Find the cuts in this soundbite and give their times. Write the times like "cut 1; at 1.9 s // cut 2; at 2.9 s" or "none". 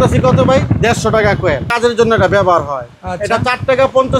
cut 1; at 1.7 s